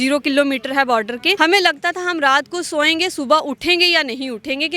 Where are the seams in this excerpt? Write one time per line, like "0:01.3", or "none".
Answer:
0:01.3